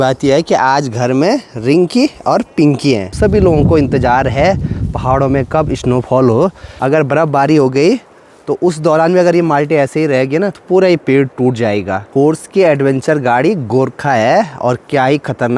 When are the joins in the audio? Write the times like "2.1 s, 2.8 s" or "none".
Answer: 3.1 s, 6.7 s, 12.1 s